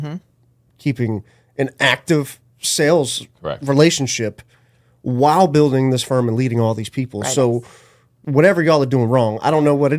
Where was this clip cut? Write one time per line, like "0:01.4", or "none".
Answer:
0:08.2